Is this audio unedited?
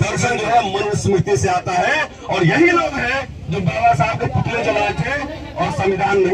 yes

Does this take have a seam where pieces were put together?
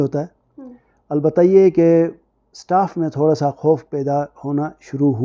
no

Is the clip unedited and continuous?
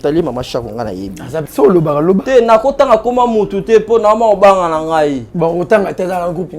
no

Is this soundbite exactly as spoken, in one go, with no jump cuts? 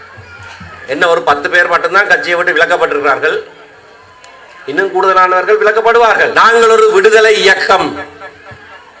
no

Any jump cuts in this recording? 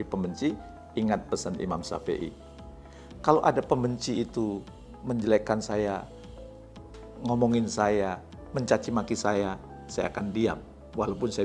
no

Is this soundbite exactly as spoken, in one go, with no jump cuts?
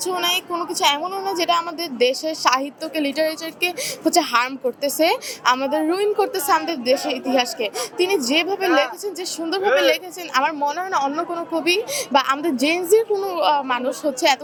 yes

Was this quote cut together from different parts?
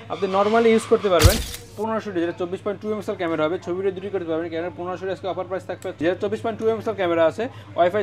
yes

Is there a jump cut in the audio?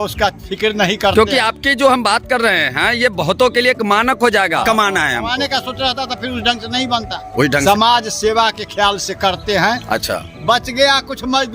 yes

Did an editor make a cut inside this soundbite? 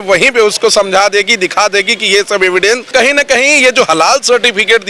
yes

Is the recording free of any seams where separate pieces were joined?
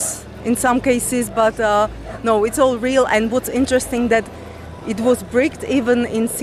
yes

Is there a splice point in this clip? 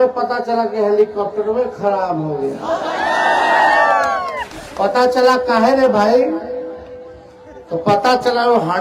no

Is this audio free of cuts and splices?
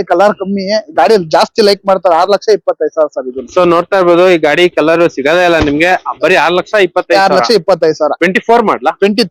yes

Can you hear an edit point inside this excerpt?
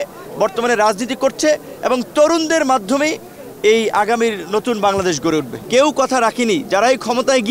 yes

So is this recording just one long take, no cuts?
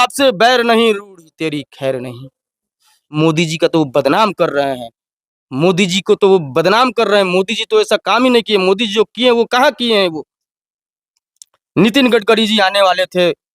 no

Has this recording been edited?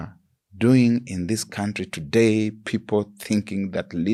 no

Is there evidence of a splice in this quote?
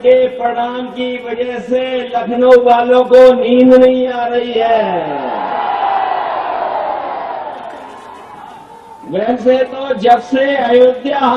no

